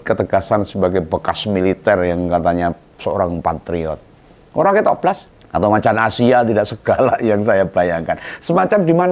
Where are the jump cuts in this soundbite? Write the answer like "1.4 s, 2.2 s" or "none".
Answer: 5.3 s